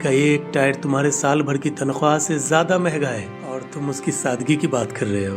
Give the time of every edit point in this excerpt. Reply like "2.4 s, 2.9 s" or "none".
3.3 s